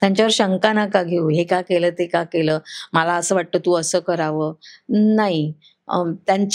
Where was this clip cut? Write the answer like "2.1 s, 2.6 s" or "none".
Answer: none